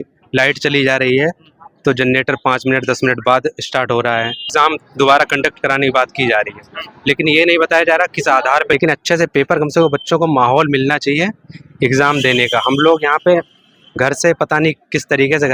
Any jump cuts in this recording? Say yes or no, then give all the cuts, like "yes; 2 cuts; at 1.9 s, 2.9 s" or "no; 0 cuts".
yes; 2 cuts; at 4.5 s, 8.7 s